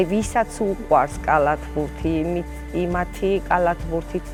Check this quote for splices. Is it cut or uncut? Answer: uncut